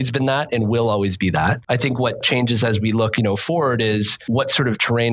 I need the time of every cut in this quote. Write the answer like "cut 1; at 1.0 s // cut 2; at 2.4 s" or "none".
cut 1; at 2.1 s // cut 2; at 3.1 s // cut 3; at 4.2 s